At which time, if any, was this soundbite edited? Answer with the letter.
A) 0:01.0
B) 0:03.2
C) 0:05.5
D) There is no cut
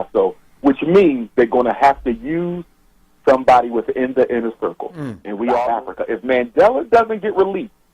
C